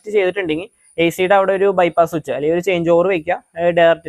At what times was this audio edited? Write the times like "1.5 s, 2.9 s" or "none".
none